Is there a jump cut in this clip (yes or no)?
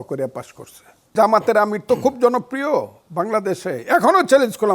yes